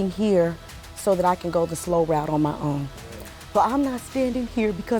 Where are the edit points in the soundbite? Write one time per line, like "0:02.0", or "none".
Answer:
none